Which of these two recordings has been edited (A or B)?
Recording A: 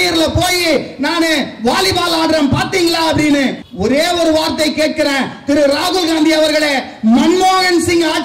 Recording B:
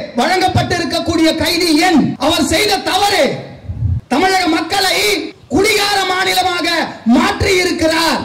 B